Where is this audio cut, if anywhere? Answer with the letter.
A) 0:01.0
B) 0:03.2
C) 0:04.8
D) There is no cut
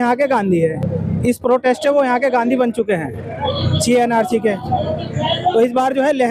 D